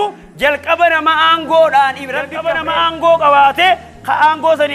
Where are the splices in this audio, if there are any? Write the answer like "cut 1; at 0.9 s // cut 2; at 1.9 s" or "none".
cut 1; at 2.4 s